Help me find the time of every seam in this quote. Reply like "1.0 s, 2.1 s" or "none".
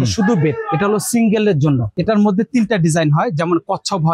1.9 s